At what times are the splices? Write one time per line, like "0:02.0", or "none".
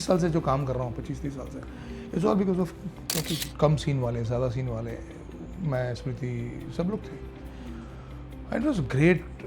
0:03.5